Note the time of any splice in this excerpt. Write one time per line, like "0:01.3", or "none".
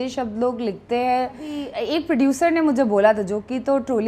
0:01.7